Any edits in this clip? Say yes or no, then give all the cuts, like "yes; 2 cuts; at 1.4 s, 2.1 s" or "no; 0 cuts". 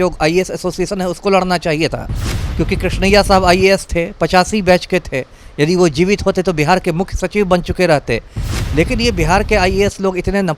no; 0 cuts